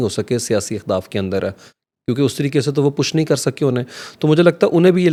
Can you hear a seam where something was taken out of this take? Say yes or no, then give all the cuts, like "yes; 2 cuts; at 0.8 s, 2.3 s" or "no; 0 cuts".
no; 0 cuts